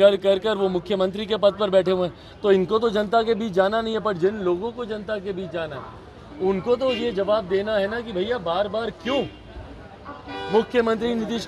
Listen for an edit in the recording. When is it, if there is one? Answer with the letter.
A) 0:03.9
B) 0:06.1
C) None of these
C